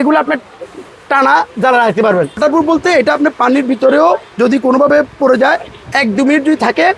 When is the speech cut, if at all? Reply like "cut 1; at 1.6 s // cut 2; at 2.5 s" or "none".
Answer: cut 1; at 2.4 s

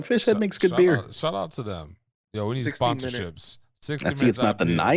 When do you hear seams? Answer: none

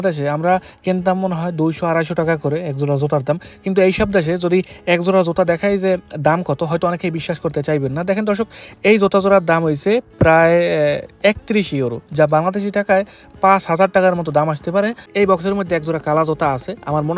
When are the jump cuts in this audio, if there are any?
cut 1; at 15.0 s

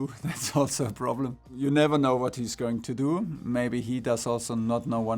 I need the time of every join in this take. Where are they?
cut 1; at 1.5 s

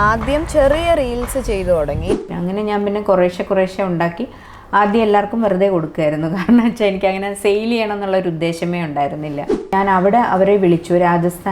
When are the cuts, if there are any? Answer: cut 1; at 2.2 s // cut 2; at 9.7 s

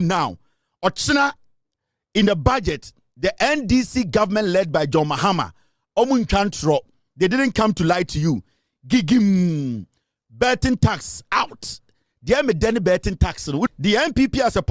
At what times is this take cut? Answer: cut 1; at 13.7 s

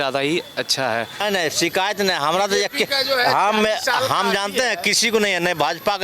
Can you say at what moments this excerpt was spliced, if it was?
cut 1; at 1.2 s

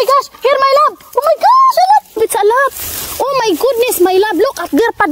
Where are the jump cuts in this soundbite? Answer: cut 1; at 2.1 s

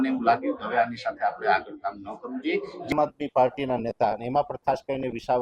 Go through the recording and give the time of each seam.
cut 1; at 2.9 s

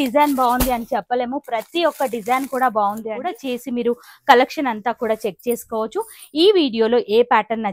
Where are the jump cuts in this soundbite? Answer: cut 1; at 3.4 s

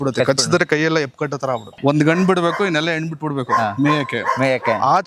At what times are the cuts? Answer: cut 1; at 1.8 s

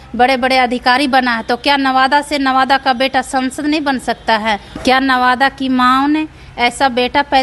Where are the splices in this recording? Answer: cut 1; at 4.8 s

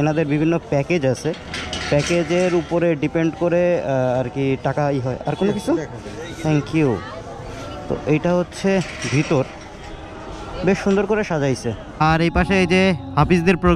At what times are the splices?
cut 1; at 12.0 s

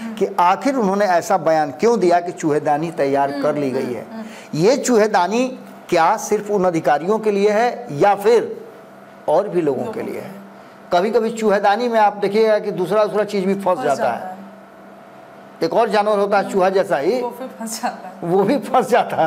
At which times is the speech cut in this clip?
none

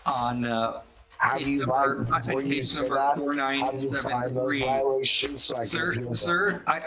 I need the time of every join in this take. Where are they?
none

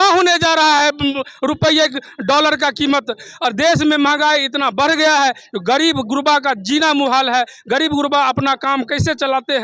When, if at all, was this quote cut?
none

